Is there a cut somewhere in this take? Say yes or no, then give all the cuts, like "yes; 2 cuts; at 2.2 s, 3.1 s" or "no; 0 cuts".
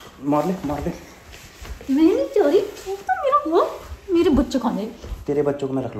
no; 0 cuts